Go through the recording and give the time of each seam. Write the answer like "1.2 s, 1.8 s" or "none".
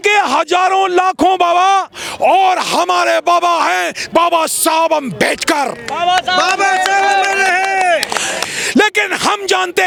none